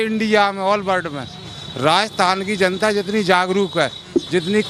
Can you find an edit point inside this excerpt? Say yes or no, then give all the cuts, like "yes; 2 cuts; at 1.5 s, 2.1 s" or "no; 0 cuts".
no; 0 cuts